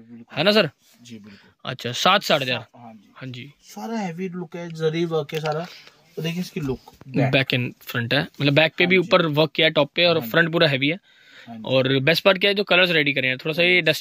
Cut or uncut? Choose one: uncut